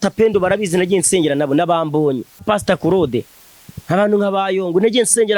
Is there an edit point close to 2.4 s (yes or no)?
yes